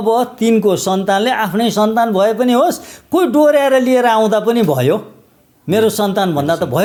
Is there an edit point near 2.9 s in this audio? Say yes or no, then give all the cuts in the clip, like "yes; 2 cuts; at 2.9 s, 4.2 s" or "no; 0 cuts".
no; 0 cuts